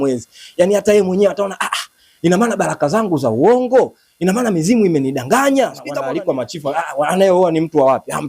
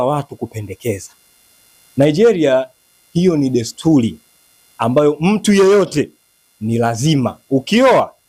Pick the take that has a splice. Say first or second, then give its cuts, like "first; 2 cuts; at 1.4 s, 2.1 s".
first; 1 cut; at 5.9 s